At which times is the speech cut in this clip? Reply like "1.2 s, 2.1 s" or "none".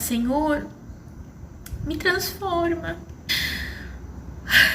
3.3 s